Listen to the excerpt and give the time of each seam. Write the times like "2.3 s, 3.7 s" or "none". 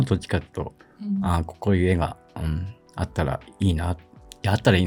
none